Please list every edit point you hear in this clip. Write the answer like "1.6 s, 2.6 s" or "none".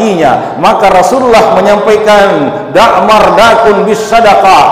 none